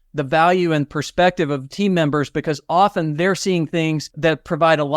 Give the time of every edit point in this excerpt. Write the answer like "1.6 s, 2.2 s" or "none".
1.7 s, 4.1 s

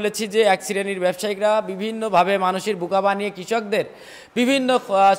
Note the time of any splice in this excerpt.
none

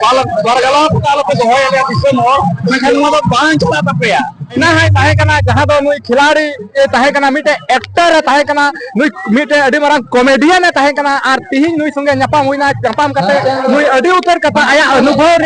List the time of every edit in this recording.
4.6 s

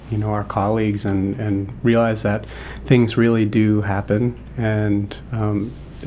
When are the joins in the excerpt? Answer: none

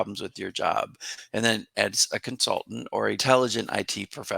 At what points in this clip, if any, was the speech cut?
3.2 s

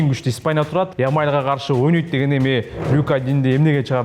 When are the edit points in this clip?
0.9 s

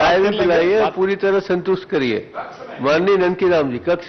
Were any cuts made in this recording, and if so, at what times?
none

